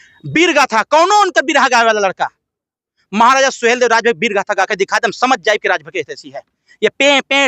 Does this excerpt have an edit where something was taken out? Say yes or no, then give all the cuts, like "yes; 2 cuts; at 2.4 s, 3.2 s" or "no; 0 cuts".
yes; 1 cut; at 4.7 s